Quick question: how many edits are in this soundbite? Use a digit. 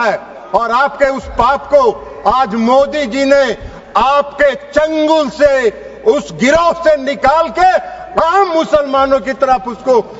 0